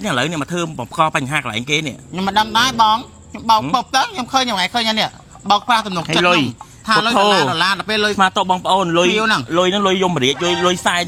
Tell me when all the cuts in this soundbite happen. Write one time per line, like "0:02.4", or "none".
none